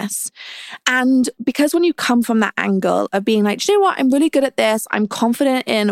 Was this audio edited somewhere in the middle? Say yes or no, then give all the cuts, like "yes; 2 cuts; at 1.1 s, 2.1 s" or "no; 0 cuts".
yes; 1 cut; at 1.3 s